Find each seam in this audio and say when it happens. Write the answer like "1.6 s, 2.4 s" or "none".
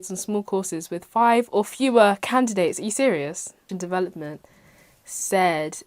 3.7 s